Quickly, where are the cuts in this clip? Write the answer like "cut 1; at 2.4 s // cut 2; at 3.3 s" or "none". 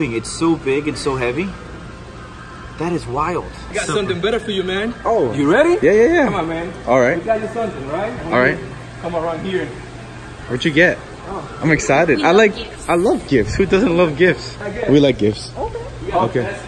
none

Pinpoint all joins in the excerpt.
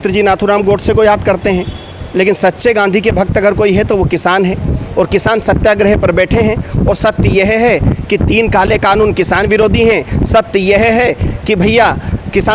none

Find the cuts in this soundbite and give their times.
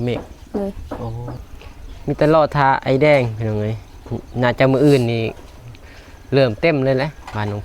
cut 1; at 1.4 s

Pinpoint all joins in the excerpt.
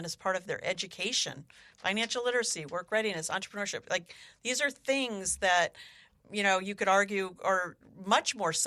none

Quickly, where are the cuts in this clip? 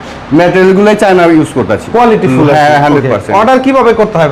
none

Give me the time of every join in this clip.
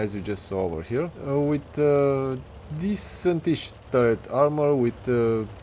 cut 1; at 1.2 s

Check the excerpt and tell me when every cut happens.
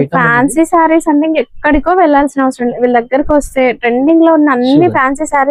none

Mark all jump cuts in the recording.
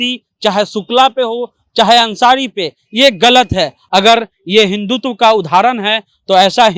cut 1; at 3.8 s

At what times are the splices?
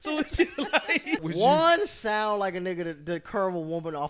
cut 1; at 1.2 s

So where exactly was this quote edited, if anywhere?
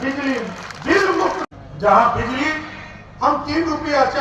cut 1; at 1.4 s

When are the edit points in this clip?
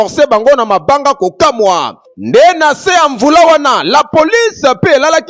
none

